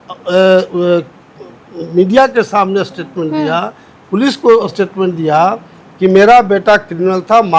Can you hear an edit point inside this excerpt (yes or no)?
no